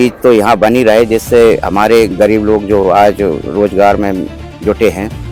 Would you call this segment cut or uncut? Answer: uncut